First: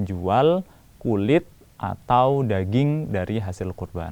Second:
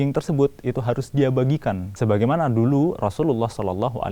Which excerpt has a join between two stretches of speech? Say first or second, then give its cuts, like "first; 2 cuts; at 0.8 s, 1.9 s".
second; 1 cut; at 1.9 s